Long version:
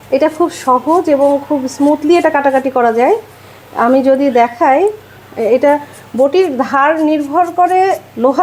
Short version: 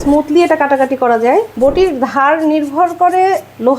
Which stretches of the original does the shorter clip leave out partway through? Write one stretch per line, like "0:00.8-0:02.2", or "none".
0:03.3-0:06.1